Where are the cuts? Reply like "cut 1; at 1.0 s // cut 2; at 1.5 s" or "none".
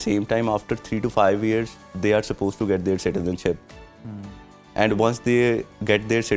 none